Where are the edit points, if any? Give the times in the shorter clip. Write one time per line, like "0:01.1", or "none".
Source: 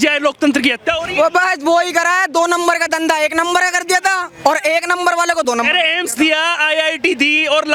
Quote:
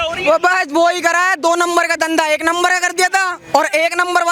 none